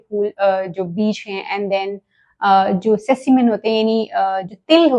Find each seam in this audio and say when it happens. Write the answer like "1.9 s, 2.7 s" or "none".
none